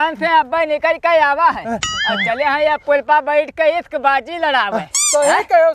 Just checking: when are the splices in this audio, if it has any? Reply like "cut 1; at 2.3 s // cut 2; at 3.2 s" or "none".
none